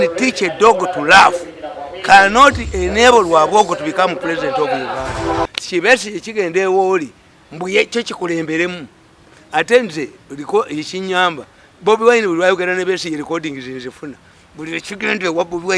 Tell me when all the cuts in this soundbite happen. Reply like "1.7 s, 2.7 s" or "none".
5.3 s